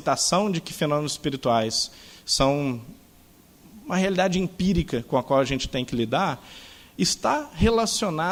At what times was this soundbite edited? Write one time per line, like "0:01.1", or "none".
none